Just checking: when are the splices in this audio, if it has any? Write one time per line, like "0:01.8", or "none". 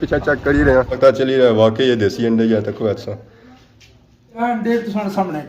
0:00.9
0:04.4